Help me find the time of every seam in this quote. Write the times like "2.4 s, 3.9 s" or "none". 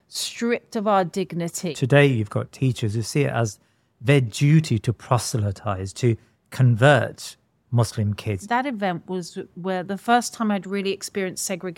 1.7 s, 8.4 s